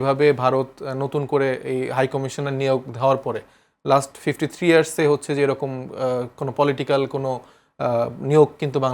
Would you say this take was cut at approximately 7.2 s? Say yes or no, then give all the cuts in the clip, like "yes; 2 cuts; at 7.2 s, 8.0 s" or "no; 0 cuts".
no; 0 cuts